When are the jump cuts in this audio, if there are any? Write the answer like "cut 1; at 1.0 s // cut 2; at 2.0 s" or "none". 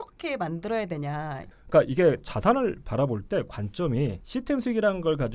cut 1; at 1.4 s // cut 2; at 4.2 s